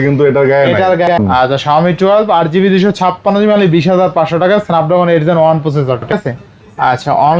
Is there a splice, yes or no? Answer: yes